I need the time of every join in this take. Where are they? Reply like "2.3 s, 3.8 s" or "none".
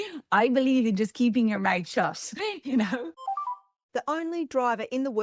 3.7 s

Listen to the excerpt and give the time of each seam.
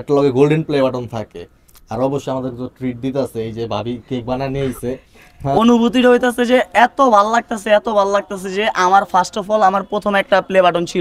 5.5 s

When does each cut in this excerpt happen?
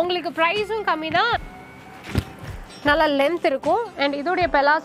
1.4 s

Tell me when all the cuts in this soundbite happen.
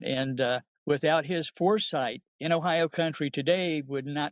none

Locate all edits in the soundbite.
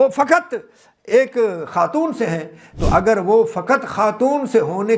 none

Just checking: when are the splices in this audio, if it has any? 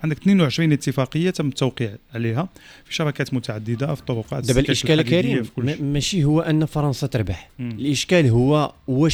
none

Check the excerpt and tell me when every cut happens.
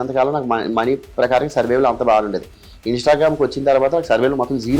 none

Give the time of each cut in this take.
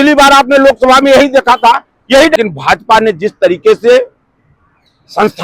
2.4 s

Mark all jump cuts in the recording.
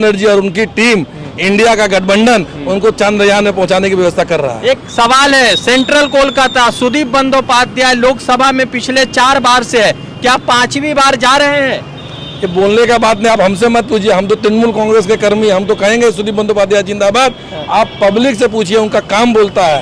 none

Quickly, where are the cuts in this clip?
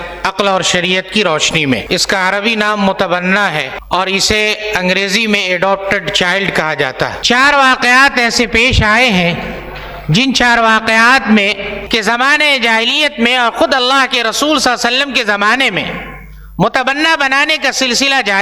1.8 s, 3.8 s, 7.2 s, 11.8 s

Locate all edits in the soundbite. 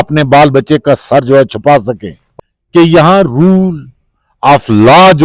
2.2 s

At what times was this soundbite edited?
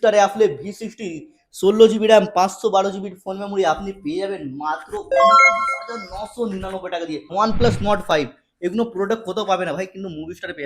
7.3 s

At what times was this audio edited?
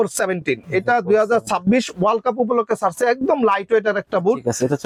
none

